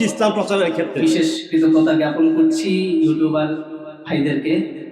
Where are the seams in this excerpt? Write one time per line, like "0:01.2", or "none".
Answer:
0:00.9